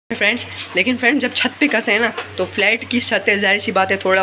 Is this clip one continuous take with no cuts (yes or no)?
yes